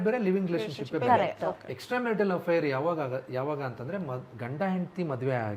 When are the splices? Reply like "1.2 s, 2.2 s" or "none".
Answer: none